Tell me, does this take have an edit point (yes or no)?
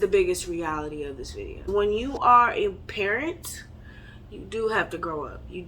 yes